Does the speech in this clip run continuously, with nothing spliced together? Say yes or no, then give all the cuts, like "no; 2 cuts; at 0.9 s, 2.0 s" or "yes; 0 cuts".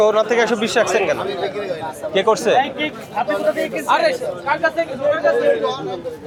yes; 0 cuts